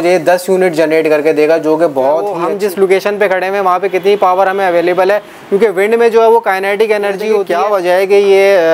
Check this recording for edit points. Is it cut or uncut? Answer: cut